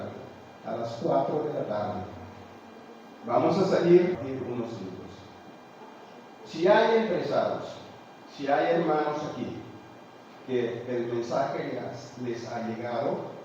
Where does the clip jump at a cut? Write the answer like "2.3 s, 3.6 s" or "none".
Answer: 4.2 s